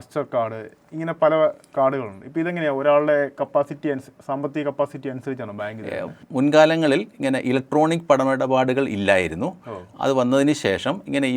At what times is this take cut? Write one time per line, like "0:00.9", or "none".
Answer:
0:05.8